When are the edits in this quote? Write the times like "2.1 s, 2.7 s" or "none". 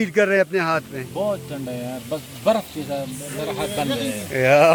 none